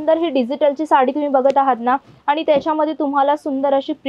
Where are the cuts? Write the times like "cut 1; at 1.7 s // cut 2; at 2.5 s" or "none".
none